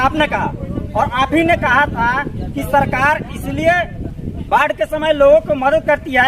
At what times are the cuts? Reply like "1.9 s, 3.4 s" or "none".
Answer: none

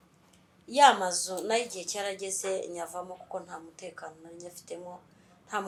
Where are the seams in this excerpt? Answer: none

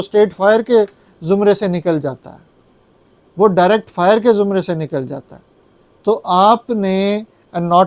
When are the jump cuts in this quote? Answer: none

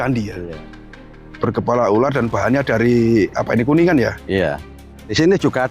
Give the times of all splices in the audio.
1.0 s, 5.0 s

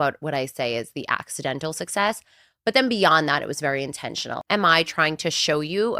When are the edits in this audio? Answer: 4.3 s

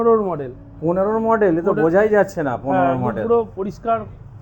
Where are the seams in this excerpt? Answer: none

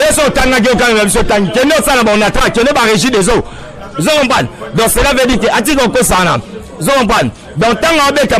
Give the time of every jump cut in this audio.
none

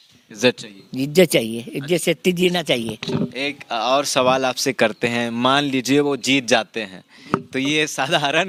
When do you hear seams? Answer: none

